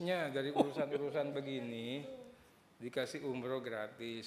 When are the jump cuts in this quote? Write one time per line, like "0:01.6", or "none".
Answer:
none